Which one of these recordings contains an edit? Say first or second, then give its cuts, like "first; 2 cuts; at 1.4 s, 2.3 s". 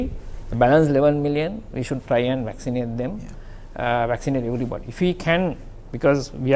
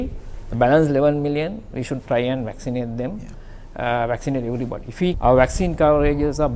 second; 1 cut; at 5.2 s